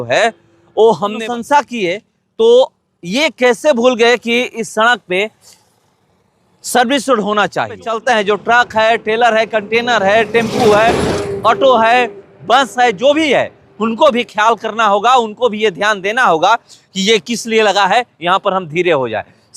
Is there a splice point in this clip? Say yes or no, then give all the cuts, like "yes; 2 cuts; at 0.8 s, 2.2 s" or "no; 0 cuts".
yes; 2 cuts; at 1.2 s, 7.8 s